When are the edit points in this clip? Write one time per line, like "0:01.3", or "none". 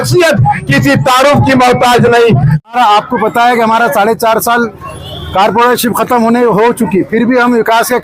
0:02.7